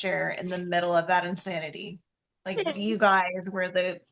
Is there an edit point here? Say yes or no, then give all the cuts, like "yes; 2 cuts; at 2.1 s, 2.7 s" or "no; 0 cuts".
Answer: no; 0 cuts